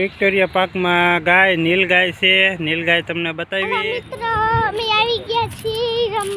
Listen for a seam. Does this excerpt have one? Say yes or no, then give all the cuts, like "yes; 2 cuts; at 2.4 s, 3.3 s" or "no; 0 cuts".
yes; 1 cut; at 3.6 s